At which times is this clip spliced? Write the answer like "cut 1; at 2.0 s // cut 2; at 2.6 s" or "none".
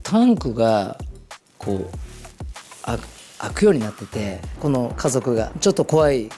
none

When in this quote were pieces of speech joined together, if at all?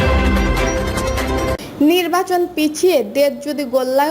cut 1; at 1.2 s

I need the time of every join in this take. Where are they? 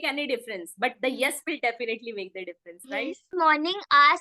cut 1; at 3.2 s

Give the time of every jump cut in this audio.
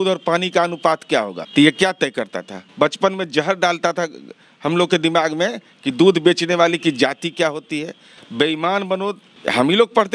cut 1; at 1.4 s // cut 2; at 2.6 s // cut 3; at 9.3 s

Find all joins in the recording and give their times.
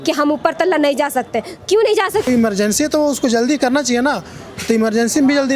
cut 1; at 2.3 s

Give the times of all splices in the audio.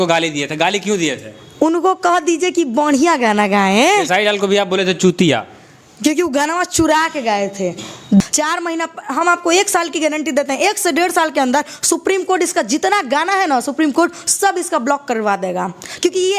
cut 1; at 8.2 s

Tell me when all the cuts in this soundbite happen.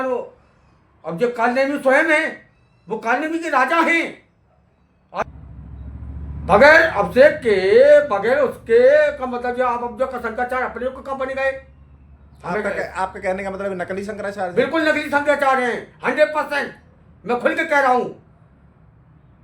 cut 1; at 5.2 s

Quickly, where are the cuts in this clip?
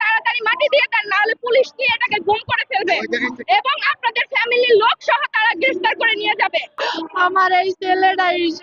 cut 1; at 6.7 s

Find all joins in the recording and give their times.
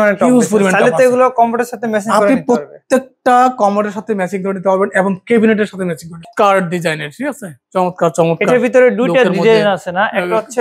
cut 1; at 6.2 s

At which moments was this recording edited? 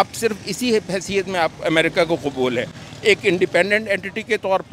none

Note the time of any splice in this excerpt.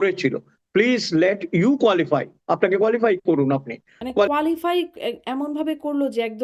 cut 1; at 4.3 s

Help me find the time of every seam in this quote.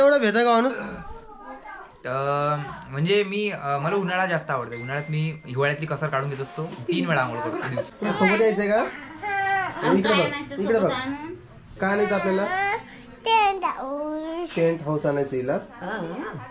cut 1; at 7.9 s

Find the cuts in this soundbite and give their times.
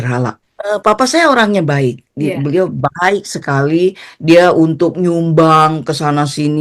cut 1; at 2.1 s

